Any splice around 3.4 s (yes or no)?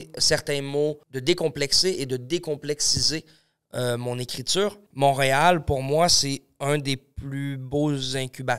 no